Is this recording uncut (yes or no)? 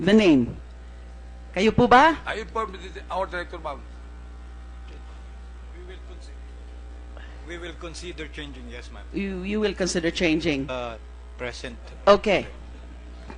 yes